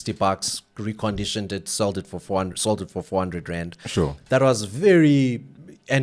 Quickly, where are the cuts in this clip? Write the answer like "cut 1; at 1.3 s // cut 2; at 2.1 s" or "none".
none